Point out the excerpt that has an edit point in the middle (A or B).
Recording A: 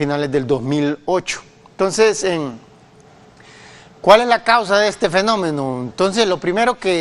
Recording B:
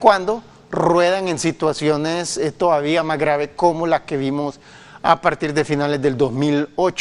B